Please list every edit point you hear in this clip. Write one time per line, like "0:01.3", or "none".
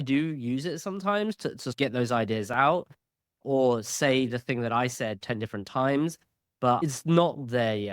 0:06.8